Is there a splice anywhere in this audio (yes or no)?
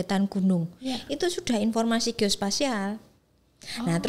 no